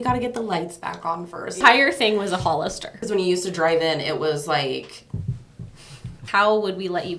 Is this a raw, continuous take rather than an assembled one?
no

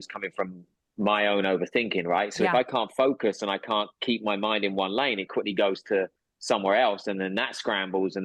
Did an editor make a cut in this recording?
no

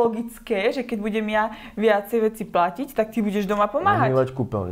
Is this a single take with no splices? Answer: yes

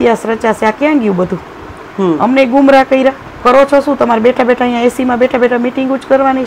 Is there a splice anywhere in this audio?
yes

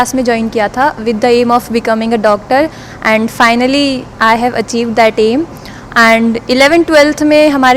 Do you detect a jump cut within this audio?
no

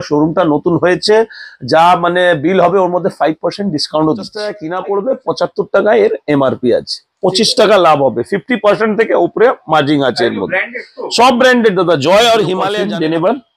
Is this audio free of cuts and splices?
no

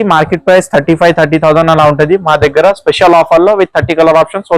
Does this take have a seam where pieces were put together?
no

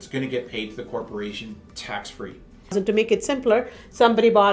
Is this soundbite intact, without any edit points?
no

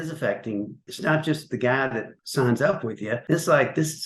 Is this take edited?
yes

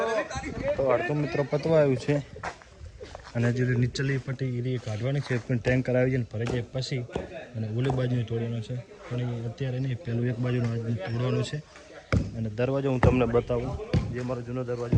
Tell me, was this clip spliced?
no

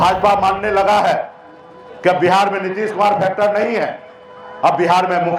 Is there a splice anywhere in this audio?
no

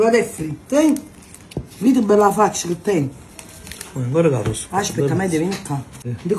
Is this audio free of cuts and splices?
yes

